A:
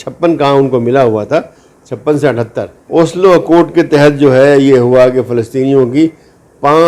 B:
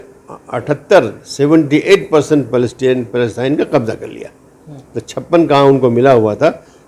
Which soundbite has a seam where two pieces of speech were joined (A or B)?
A